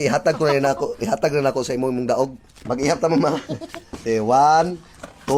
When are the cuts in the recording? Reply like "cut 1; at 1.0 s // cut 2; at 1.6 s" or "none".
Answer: cut 1; at 2.5 s